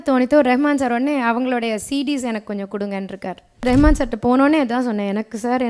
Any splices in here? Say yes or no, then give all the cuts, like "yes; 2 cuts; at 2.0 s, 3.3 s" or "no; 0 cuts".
yes; 1 cut; at 3.6 s